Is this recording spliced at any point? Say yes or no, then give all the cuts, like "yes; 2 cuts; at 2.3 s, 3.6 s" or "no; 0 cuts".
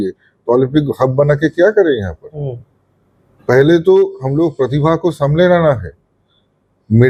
no; 0 cuts